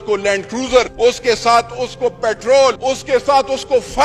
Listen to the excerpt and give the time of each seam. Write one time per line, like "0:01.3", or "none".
0:00.9
0:02.8